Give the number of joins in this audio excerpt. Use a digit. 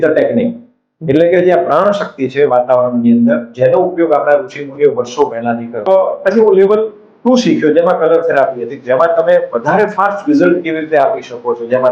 1